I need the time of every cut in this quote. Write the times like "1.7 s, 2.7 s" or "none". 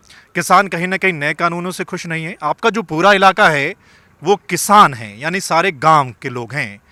none